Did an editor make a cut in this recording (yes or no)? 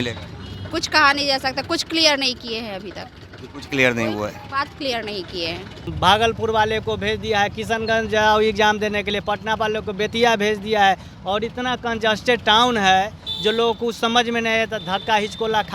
yes